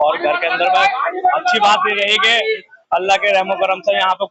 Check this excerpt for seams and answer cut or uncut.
uncut